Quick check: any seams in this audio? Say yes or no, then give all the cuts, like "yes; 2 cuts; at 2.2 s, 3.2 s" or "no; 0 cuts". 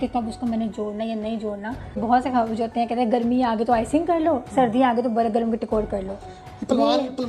yes; 1 cut; at 1.9 s